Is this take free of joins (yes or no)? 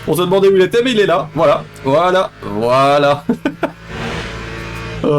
yes